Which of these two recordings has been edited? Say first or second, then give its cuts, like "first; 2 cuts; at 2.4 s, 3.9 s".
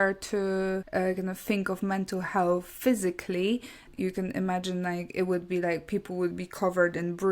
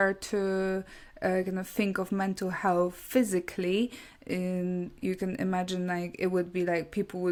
first; 2 cuts; at 0.9 s, 3.9 s